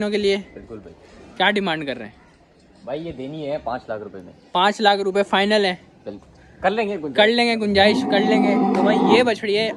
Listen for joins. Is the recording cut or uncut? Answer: uncut